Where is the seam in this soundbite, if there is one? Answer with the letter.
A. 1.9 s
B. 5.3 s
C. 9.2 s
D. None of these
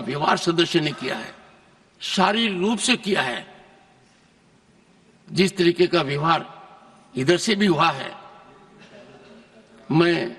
D